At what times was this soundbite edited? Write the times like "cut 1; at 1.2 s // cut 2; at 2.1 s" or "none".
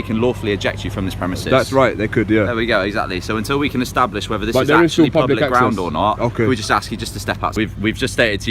cut 1; at 7.5 s